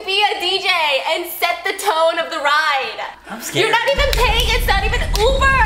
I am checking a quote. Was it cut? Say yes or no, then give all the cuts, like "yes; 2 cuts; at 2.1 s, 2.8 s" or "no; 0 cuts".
no; 0 cuts